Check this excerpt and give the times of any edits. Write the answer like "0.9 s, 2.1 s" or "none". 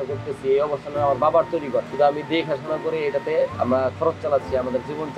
1.9 s